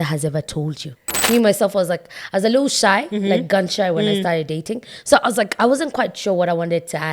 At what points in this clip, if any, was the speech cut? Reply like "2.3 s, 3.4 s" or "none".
1.1 s